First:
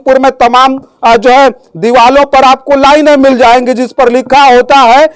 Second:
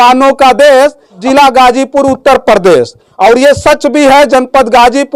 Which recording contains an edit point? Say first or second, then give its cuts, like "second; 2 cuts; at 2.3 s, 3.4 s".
second; 1 cut; at 1.2 s